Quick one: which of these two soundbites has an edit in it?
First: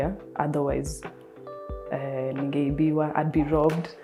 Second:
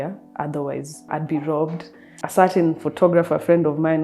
second; 2 cuts; at 1.1 s, 2.2 s

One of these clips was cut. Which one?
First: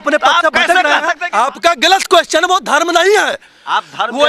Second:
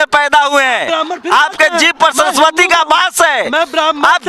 first; 1 cut; at 1.2 s

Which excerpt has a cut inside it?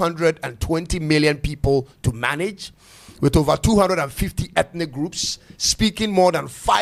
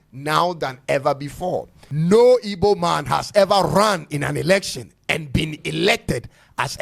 second; 1 cut; at 1.8 s

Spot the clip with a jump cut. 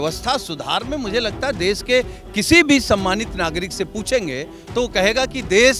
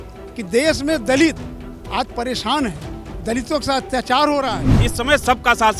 second; 1 cut; at 4.8 s

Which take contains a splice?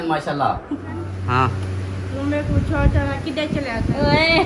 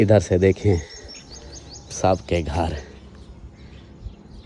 first; 1 cut; at 1.1 s

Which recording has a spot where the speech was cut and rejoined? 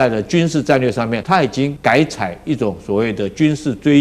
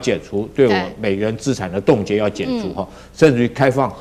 first; 1 cut; at 1.5 s

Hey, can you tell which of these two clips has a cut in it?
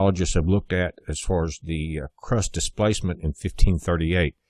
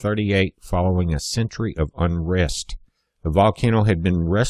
second; 1 cut; at 1.7 s

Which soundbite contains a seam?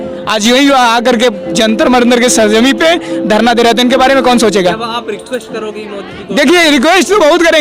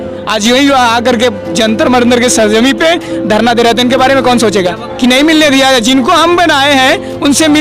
second; 1 cut; at 4.8 s

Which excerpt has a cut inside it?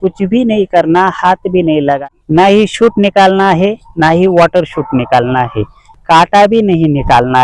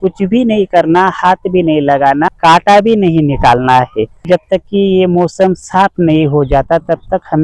first; 2 cuts; at 2.0 s, 6.0 s

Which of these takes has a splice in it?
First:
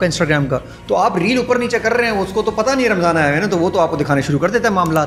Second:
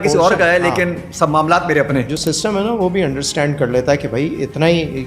second; 1 cut; at 2.1 s

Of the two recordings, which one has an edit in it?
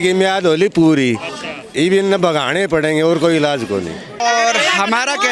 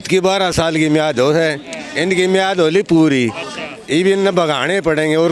first; 1 cut; at 4.2 s

